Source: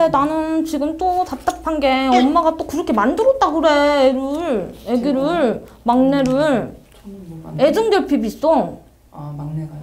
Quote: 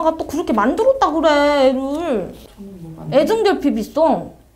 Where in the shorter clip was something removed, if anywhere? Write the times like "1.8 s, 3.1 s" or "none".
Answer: 2.3 s